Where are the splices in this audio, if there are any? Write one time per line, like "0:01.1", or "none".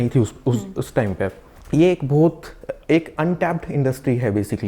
0:01.5

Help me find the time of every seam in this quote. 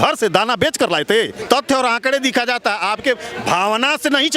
0:01.4

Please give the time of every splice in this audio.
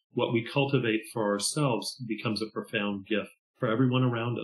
0:03.4

